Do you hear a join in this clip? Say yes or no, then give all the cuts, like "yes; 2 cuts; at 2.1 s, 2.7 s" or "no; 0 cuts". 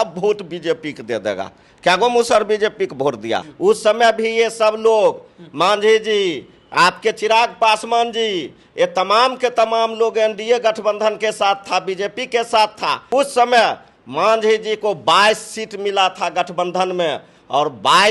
yes; 2 cuts; at 3.4 s, 13.1 s